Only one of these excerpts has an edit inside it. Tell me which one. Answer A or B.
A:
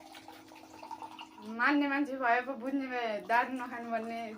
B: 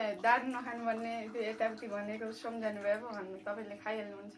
A